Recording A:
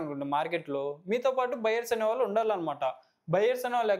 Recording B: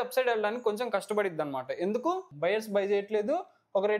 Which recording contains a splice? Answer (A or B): B